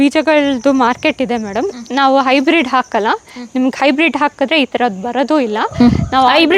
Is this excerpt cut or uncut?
uncut